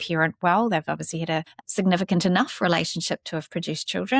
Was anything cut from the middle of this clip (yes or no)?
yes